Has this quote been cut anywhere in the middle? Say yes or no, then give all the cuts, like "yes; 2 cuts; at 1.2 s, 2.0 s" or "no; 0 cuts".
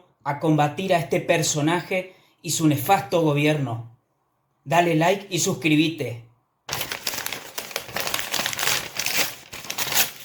no; 0 cuts